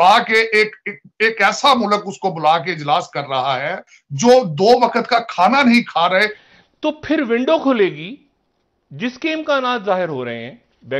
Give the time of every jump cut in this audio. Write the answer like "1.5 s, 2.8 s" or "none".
4.0 s, 6.4 s